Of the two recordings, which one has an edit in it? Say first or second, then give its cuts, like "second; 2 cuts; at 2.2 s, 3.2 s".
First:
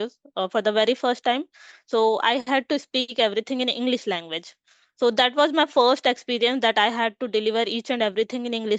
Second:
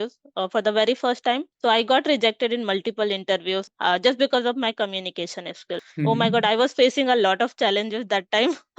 second; 3 cuts; at 1.5 s, 3.7 s, 5.9 s